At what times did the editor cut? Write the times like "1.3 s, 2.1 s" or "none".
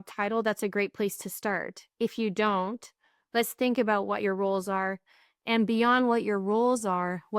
none